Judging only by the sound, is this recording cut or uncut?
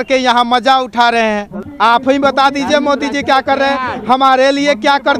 cut